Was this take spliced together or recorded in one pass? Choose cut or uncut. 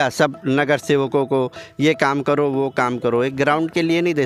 uncut